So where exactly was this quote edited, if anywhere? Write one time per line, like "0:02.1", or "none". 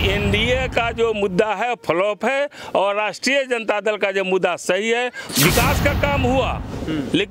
0:05.2

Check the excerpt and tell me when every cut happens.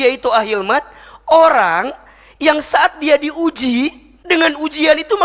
0:04.1

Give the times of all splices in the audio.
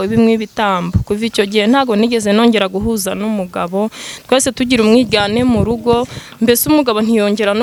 none

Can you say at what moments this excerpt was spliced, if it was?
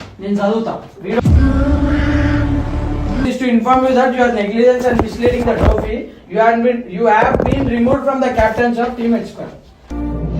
0:01.2
0:03.2

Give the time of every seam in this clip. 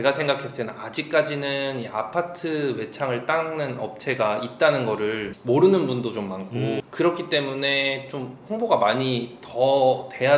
none

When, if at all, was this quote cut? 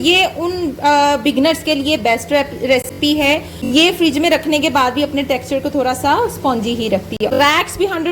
0:03.2
0:07.2

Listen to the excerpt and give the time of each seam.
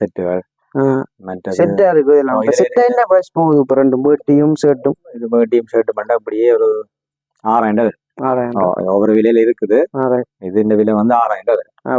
none

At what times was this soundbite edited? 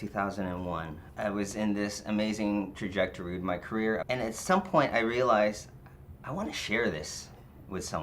0:01.0
0:04.0

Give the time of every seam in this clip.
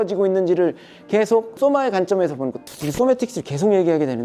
0:01.6
0:02.6

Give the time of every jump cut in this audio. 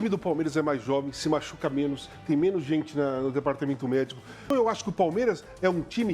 0:04.5

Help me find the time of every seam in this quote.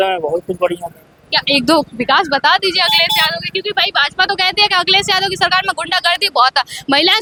none

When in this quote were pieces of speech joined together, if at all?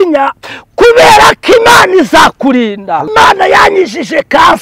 0:03.1

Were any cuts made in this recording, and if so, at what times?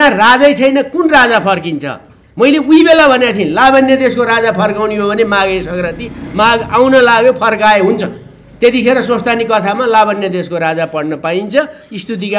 none

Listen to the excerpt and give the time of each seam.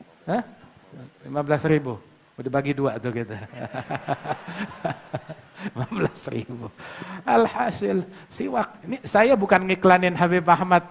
none

